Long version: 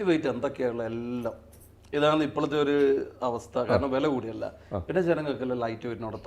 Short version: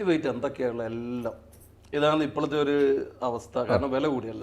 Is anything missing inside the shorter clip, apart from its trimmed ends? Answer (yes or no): no